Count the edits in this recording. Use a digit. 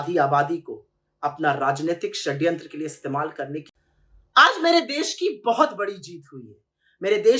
1